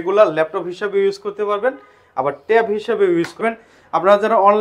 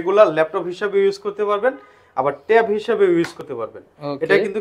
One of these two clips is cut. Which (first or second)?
first